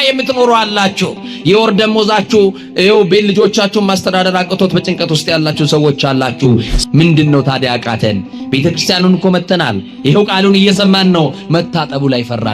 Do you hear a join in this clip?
yes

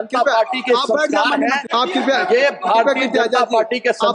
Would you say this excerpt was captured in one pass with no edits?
no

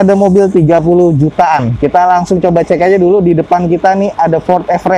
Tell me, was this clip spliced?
no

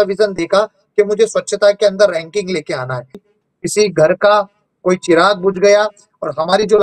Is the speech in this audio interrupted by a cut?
yes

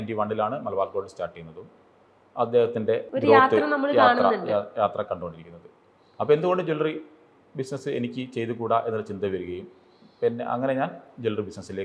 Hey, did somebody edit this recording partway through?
no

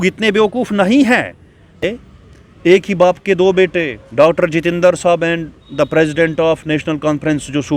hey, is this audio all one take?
no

